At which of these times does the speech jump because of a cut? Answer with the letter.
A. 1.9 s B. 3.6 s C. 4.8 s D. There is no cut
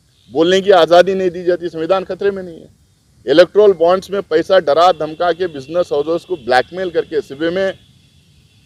D